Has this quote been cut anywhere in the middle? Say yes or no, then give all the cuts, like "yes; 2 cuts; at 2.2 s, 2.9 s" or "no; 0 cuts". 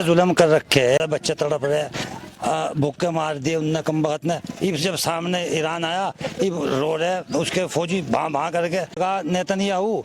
yes; 2 cuts; at 1.0 s, 9.0 s